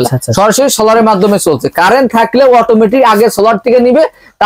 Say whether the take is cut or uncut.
uncut